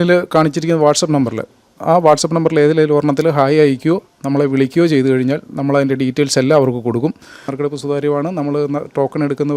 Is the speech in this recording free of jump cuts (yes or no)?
no